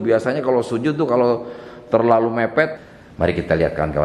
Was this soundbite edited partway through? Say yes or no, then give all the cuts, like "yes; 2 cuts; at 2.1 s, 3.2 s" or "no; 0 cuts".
yes; 1 cut; at 2.7 s